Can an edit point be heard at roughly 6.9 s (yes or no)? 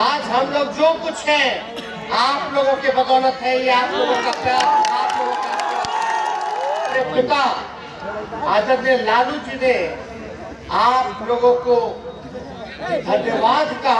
yes